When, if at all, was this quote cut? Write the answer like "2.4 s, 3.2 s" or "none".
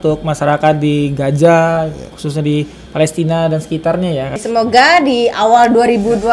4.4 s